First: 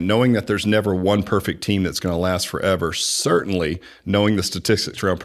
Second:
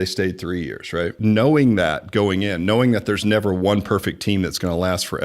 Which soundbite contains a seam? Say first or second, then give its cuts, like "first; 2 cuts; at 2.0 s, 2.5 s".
second; 1 cut; at 1.1 s